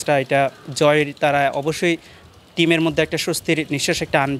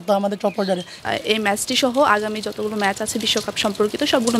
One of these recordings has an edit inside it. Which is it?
second; 1 cut; at 1.0 s

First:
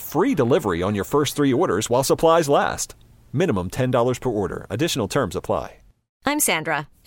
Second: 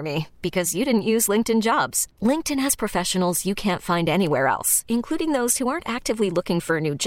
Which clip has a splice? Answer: first; 1 cut; at 6.0 s

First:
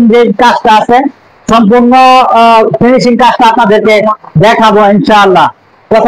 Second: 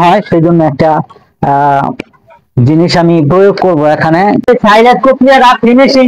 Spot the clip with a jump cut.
second; 1 cut; at 4.5 s

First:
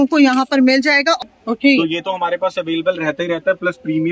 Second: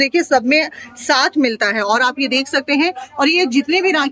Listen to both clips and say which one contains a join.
first; 1 cut; at 1.2 s

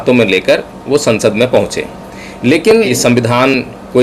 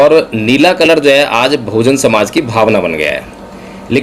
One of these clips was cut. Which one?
first; 1 cut; at 2.9 s

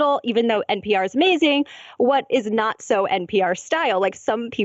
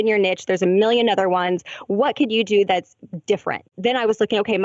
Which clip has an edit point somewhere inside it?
second; 1 cut; at 3.7 s

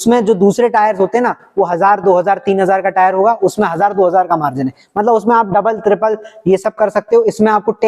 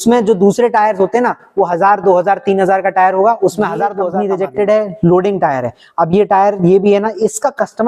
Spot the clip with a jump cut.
second; 1 cut; at 4.1 s

